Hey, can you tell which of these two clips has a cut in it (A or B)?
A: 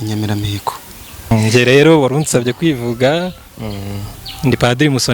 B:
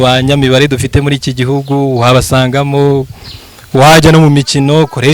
A